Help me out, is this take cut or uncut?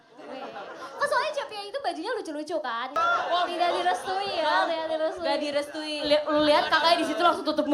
cut